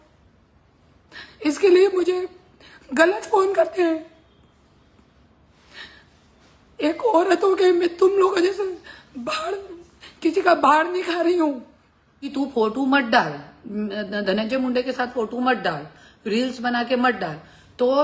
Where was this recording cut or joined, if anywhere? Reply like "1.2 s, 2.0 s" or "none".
12.3 s